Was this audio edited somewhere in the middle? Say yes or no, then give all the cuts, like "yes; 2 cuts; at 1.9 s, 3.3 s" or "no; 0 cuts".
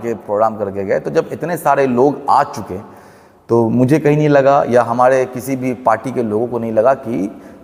no; 0 cuts